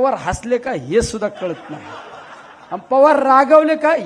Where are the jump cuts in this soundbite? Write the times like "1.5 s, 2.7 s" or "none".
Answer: none